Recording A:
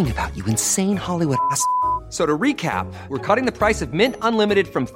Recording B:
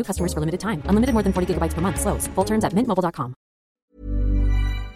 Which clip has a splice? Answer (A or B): B